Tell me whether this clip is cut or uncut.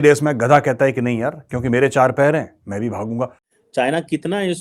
cut